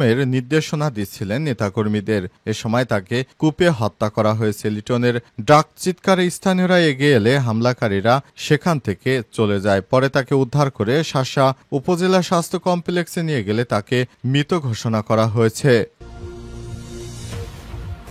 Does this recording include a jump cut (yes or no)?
yes